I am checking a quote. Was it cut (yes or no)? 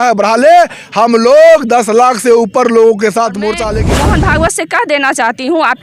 yes